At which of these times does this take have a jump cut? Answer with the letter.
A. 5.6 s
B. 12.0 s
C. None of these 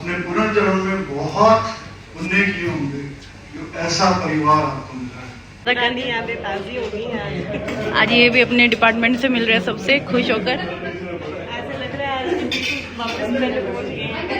A